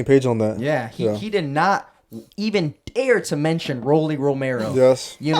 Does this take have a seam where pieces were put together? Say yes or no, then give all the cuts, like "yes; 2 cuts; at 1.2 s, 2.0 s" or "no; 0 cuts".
no; 0 cuts